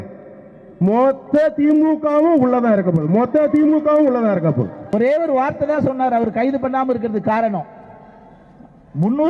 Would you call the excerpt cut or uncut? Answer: cut